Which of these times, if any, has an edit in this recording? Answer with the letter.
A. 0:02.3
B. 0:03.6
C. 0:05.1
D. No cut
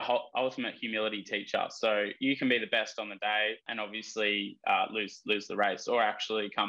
B